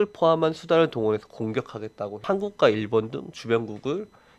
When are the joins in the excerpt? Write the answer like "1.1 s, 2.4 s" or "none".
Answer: 2.1 s

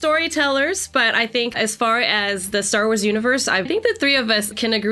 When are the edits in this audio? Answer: 1.5 s, 3.7 s

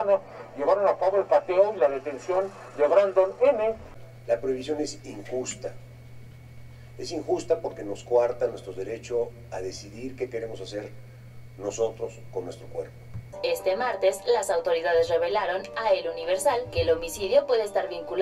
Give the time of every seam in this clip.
3.9 s, 13.3 s

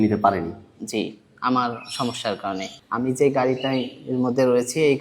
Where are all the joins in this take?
2.8 s

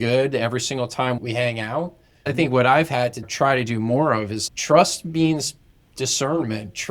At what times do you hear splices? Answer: 1.2 s, 3.2 s, 4.4 s

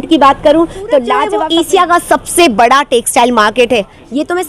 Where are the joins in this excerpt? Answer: 1.4 s

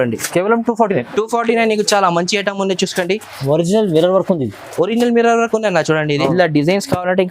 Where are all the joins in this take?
6.3 s

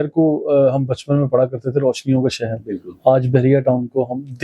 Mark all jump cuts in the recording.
none

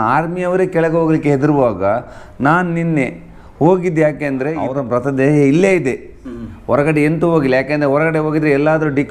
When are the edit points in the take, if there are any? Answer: 4.7 s

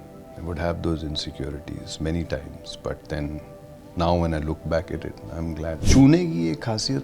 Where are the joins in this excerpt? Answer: 5.8 s

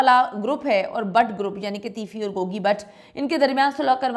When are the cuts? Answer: none

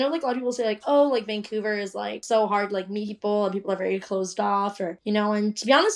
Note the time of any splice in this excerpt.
2.2 s

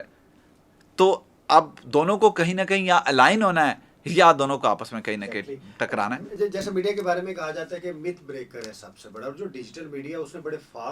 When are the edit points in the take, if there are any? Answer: none

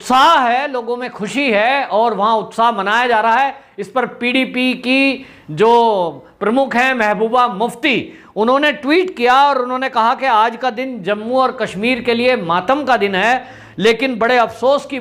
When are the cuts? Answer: none

